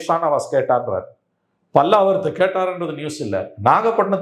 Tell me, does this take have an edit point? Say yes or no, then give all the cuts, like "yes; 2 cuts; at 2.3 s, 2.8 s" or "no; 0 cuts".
no; 0 cuts